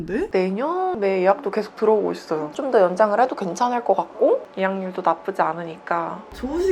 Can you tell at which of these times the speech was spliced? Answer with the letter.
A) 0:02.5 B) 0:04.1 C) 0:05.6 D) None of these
A